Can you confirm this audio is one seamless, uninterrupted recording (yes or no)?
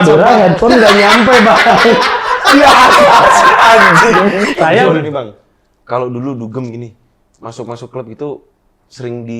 no